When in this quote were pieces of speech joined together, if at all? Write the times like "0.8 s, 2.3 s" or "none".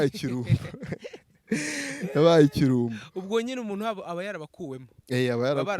none